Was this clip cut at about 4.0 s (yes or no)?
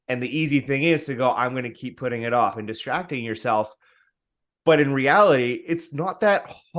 no